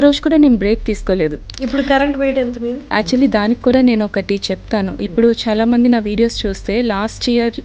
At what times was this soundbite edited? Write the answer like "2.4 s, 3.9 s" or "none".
1.5 s, 2.8 s